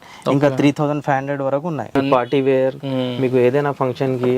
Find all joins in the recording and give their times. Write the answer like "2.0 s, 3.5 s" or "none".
1.9 s